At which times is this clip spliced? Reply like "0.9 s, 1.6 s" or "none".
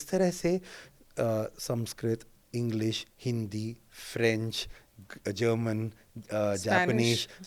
none

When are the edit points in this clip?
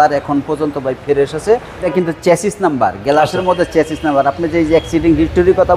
1.9 s

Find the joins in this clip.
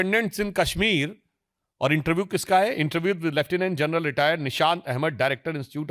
none

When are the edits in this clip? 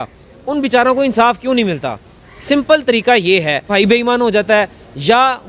3.7 s

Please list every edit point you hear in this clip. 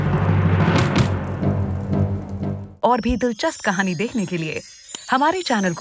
2.6 s

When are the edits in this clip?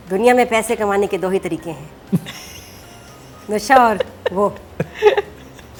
none

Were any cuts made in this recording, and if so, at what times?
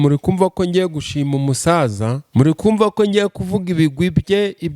2.2 s

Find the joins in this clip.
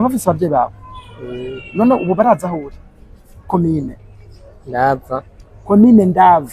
3.5 s

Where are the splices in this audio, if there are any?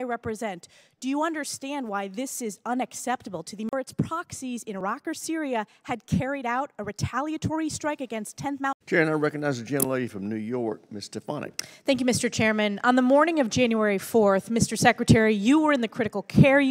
3.7 s, 8.8 s, 13.8 s

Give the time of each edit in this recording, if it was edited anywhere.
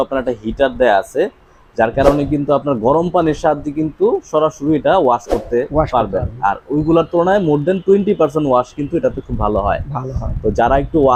none

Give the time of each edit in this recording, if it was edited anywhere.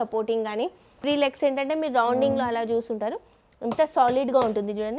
1.0 s

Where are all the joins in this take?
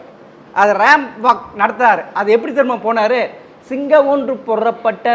none

